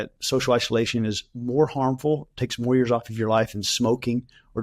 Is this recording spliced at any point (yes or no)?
yes